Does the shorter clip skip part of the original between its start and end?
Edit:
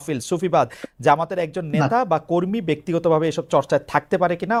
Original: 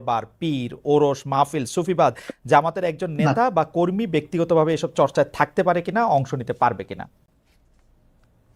no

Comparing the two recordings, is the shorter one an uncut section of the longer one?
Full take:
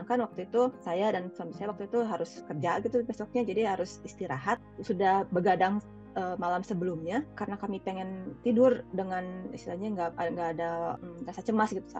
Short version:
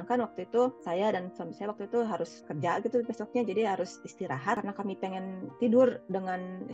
no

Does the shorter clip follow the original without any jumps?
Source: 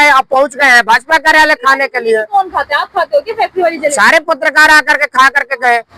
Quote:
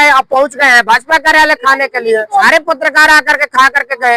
no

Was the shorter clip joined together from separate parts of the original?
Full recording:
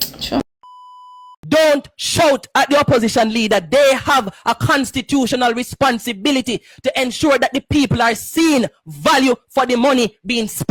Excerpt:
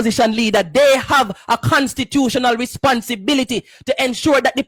no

